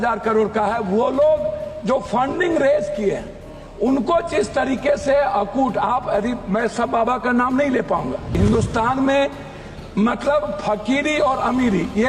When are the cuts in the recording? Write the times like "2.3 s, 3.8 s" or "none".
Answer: 8.3 s